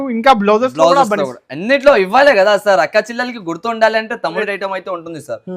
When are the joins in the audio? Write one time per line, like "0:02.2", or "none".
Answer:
0:04.4